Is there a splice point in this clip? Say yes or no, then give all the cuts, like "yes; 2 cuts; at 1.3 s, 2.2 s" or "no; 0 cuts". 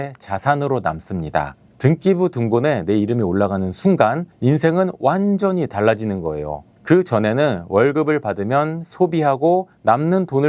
no; 0 cuts